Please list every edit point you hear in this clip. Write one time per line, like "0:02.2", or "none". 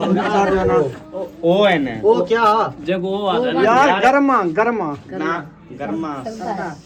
none